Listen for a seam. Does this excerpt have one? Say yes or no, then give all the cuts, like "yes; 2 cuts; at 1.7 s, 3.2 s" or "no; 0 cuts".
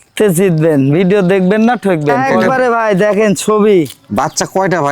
yes; 1 cut; at 2.3 s